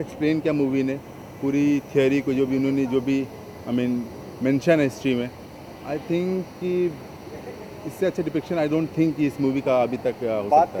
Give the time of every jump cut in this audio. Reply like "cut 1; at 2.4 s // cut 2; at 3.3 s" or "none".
none